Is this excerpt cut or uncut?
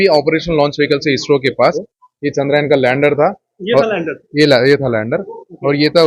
cut